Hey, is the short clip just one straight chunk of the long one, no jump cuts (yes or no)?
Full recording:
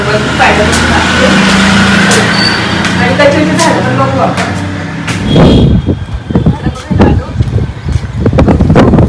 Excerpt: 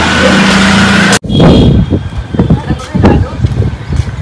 no